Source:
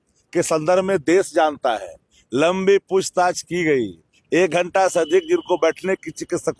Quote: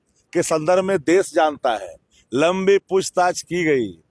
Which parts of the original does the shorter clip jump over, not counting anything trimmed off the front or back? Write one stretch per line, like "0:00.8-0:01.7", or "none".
none